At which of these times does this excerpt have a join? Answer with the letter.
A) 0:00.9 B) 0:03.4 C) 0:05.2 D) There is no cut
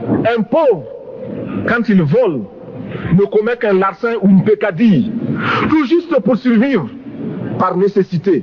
D